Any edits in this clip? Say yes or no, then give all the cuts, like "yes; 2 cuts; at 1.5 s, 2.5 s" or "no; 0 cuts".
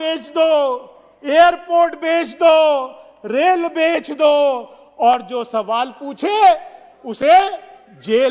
no; 0 cuts